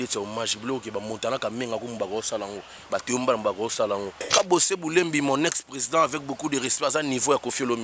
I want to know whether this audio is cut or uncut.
cut